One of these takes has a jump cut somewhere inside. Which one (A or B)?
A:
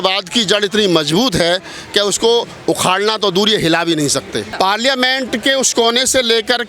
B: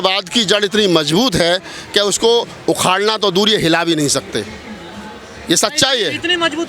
A